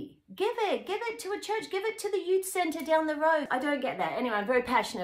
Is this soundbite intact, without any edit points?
no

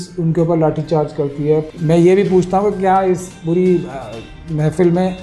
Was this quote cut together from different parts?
yes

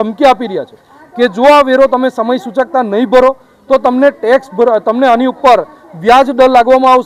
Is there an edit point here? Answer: no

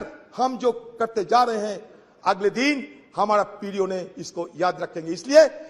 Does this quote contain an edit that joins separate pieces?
no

